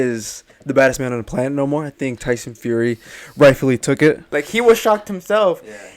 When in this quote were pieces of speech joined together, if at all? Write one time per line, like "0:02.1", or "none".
0:04.3